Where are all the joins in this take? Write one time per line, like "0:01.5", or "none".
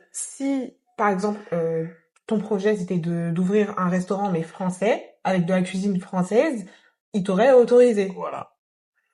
none